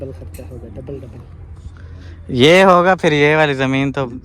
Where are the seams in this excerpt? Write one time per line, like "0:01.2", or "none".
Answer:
none